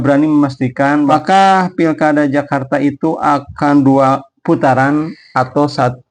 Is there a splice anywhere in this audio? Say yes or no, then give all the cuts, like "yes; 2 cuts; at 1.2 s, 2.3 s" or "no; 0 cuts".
yes; 1 cut; at 1.1 s